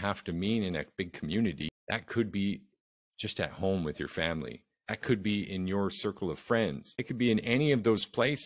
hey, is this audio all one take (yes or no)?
no